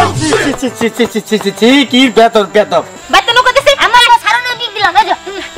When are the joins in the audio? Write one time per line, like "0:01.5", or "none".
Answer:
0:03.0